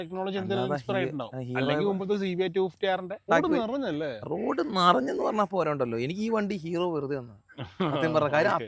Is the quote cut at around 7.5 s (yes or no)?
no